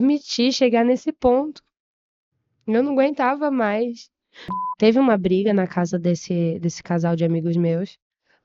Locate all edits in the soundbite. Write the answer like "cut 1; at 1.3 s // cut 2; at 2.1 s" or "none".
cut 1; at 4.6 s